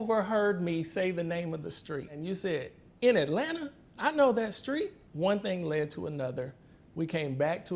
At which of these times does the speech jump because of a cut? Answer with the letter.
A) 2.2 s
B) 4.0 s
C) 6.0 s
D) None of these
A